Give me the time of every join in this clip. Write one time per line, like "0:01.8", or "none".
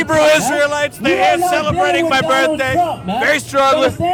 none